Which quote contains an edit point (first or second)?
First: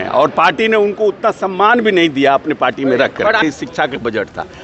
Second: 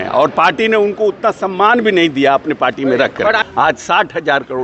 second